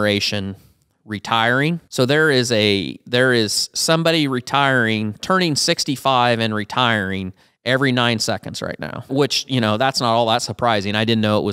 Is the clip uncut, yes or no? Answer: no